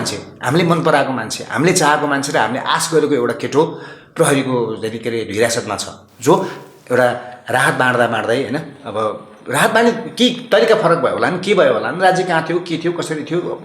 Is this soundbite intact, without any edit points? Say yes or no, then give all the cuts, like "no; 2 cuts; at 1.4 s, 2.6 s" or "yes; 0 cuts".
yes; 0 cuts